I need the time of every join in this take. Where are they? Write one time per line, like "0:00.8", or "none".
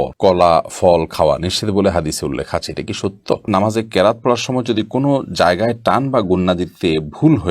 0:03.5